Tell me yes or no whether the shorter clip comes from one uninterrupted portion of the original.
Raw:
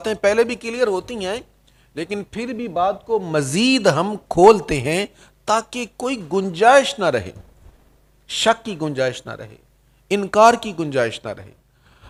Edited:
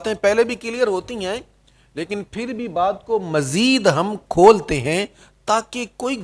yes